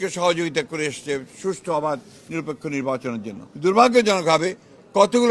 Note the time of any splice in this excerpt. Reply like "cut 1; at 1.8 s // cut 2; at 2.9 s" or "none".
cut 1; at 3.4 s